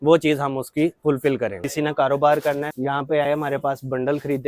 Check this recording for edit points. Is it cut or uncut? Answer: cut